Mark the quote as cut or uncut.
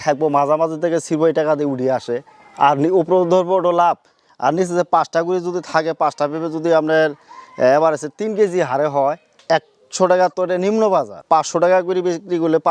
uncut